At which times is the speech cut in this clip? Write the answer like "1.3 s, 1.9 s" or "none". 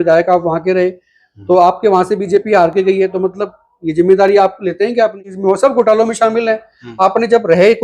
5.3 s